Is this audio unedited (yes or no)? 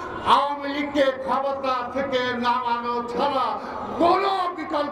yes